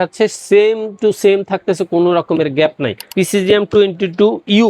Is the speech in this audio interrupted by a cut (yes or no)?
yes